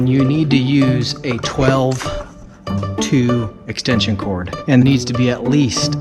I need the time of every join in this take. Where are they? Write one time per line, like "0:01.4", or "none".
0:04.8